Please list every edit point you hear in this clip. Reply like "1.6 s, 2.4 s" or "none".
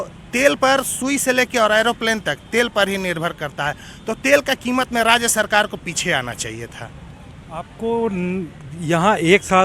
none

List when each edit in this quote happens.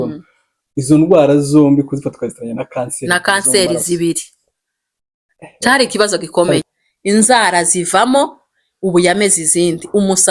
6.6 s

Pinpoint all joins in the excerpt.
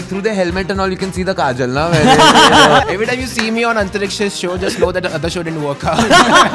2.9 s

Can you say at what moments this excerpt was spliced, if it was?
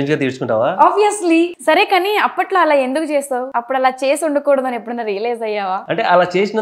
1.5 s

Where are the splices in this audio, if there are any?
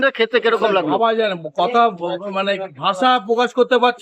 none

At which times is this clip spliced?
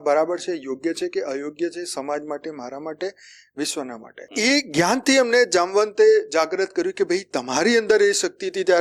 4.3 s

